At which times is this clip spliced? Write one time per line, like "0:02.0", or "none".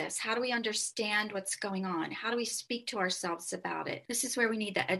0:04.0